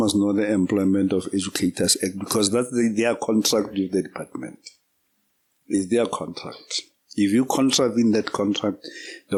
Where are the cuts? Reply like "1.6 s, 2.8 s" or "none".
none